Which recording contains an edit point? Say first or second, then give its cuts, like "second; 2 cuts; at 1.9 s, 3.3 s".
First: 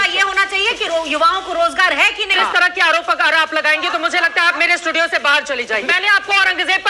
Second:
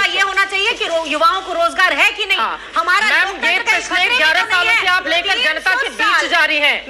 first; 2 cuts; at 2.4 s, 5.9 s